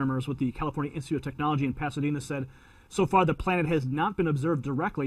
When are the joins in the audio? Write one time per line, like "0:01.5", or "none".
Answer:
0:01.6